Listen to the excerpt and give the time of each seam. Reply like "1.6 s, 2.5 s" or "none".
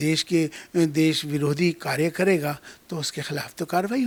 none

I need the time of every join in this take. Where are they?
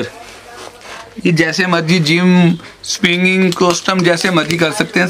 none

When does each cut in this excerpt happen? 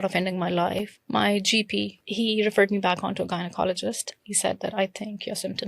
0.9 s, 2.1 s

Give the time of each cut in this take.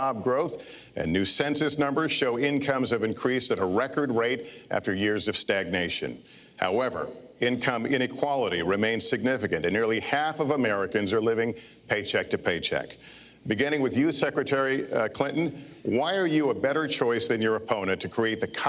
9.4 s

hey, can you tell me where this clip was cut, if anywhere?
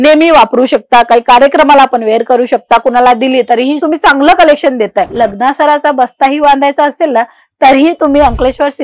5.1 s

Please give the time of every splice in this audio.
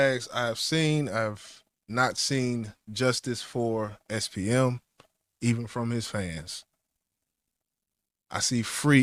none

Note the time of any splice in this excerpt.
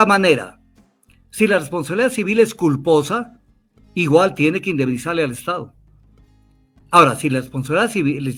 none

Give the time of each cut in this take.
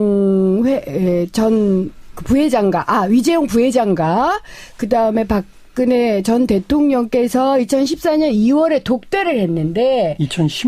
2.9 s

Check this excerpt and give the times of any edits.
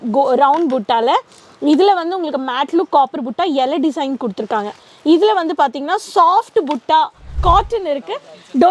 7.4 s

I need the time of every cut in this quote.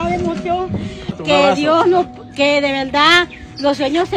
1.2 s

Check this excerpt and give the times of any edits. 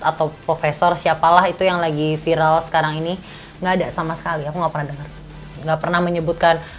5.5 s

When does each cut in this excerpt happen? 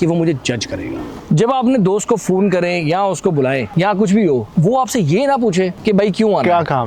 1.1 s, 3.7 s, 4.5 s, 5.8 s

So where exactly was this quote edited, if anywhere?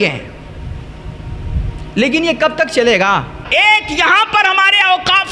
3.4 s

